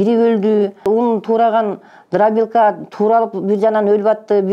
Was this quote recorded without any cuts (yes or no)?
no